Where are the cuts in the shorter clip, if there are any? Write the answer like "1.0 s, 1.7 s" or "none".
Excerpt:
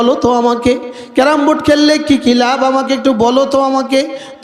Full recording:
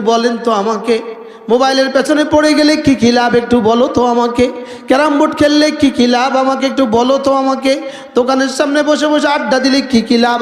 none